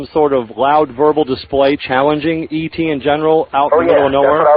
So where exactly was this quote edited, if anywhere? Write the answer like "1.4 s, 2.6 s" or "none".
none